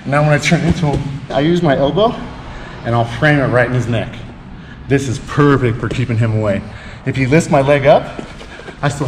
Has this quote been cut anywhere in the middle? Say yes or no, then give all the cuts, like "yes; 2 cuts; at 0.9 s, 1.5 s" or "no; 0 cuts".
yes; 1 cut; at 1.3 s